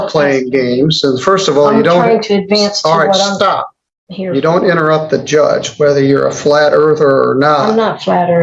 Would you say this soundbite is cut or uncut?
uncut